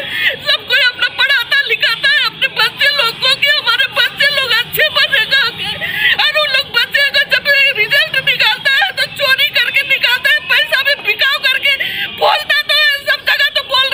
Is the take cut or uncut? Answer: uncut